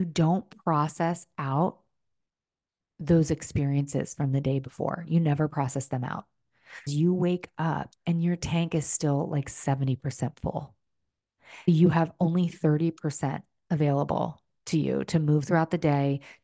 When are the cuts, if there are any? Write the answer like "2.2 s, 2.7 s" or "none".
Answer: 6.9 s